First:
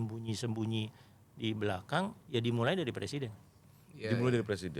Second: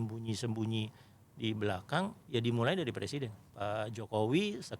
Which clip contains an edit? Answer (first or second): second